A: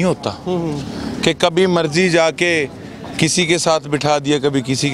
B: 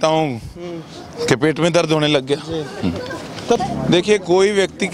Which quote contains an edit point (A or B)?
B